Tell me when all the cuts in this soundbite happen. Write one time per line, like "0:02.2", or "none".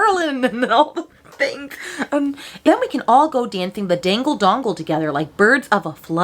0:02.5

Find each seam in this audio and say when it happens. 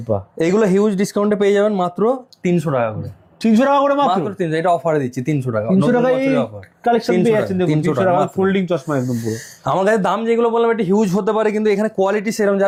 none

